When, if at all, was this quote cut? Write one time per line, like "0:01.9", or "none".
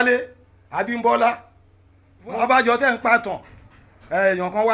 0:02.3